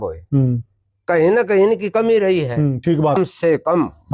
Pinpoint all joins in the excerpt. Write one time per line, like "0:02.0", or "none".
0:03.2